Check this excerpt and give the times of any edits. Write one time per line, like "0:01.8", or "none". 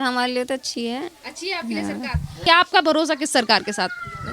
0:02.5